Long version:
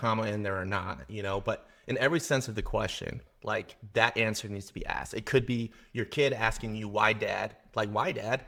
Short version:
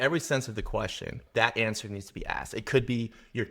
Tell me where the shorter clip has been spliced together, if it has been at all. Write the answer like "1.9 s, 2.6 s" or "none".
1.2 s